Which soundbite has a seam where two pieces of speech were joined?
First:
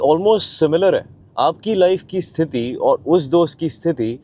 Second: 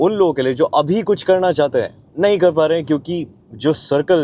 second; 1 cut; at 2.0 s

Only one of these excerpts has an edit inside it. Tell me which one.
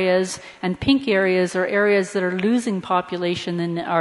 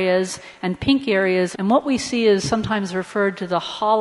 first; 1 cut; at 1.5 s

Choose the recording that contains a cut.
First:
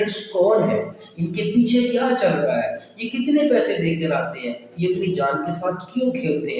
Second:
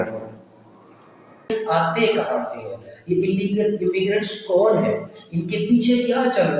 second; 1 cut; at 1.5 s

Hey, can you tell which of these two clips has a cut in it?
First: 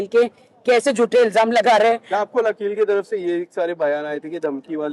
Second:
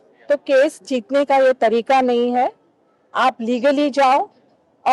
first; 1 cut; at 2.6 s

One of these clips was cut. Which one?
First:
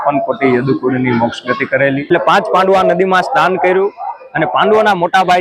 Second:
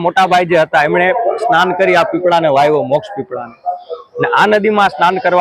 first; 1 cut; at 2.1 s

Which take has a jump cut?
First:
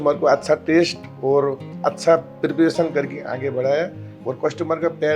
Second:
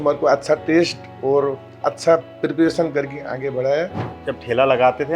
second; 1 cut; at 4.1 s

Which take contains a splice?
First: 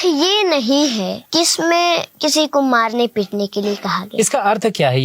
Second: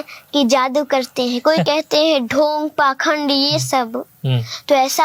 first; 2 cuts; at 1.2 s, 2.1 s

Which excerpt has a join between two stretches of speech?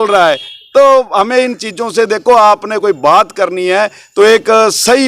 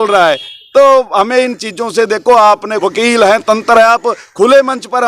second; 1 cut; at 2.7 s

